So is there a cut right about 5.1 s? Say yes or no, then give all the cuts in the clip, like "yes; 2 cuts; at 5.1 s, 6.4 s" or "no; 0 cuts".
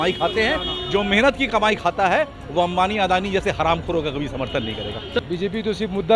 yes; 1 cut; at 5.1 s